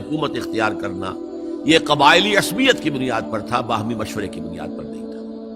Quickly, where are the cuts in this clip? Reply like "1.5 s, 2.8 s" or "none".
4.4 s